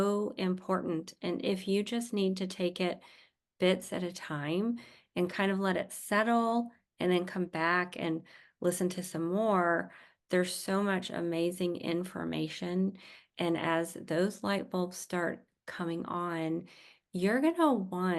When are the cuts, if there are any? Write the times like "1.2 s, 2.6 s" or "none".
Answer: none